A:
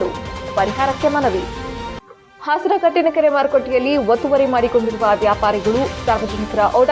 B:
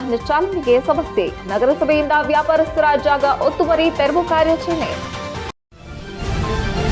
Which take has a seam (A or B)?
B